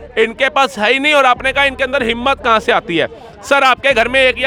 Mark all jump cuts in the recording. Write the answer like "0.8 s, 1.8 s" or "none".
none